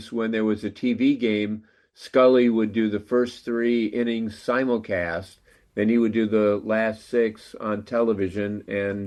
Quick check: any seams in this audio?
no; 0 cuts

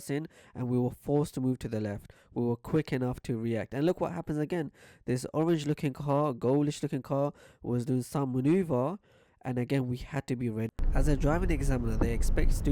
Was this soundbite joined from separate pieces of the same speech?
yes; 1 cut; at 10.7 s

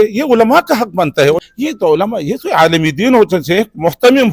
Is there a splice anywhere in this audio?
yes; 1 cut; at 1.4 s

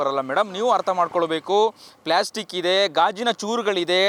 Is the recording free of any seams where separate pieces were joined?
yes; 0 cuts

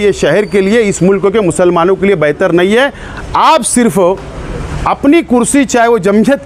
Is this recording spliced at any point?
no; 0 cuts

